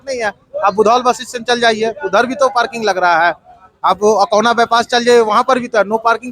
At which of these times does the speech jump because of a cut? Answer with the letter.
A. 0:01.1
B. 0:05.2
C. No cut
C